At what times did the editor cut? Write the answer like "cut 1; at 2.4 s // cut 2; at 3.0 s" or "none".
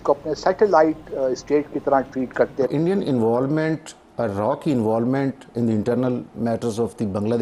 cut 1; at 2.7 s